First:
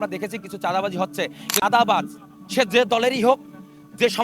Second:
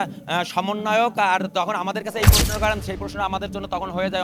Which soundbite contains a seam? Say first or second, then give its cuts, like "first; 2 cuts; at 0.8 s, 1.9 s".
first; 1 cut; at 1.6 s